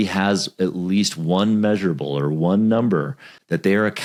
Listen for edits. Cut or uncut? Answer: uncut